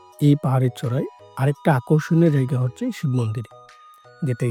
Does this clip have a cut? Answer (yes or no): no